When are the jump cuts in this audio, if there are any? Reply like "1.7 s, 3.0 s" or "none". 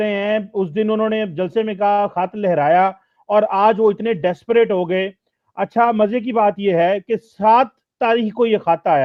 none